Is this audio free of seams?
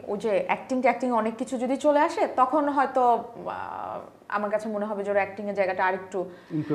yes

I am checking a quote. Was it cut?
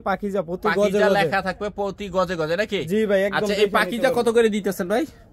no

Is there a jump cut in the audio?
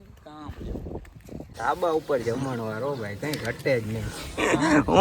yes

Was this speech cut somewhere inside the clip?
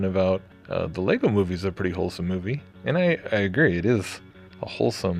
yes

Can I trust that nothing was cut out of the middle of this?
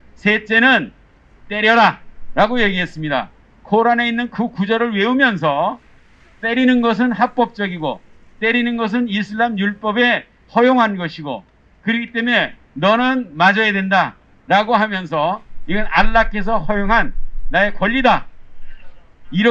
yes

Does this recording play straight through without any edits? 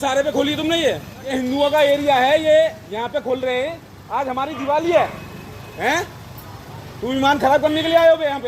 no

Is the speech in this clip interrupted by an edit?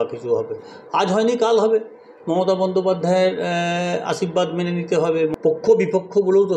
yes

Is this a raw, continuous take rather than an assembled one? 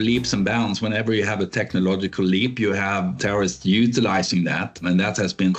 yes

